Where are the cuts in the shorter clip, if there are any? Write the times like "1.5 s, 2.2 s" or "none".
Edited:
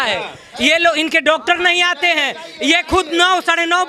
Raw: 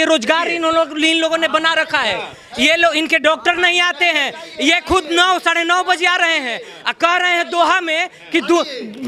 none